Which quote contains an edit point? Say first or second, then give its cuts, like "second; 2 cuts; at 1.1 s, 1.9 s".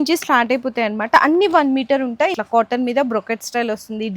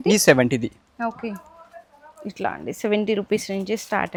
first; 1 cut; at 2.3 s